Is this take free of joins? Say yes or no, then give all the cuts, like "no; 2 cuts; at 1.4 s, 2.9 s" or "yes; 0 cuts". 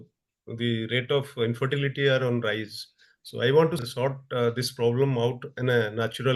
yes; 0 cuts